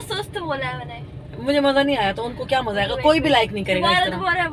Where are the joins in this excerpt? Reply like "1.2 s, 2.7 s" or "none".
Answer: none